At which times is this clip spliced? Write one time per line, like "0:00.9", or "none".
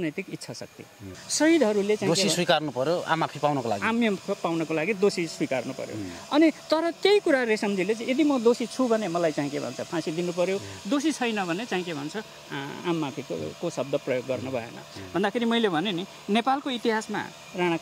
0:01.2